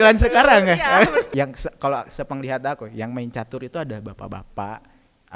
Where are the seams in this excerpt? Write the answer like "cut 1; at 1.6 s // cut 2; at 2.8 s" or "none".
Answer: cut 1; at 1.3 s